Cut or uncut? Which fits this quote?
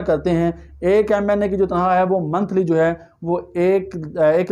uncut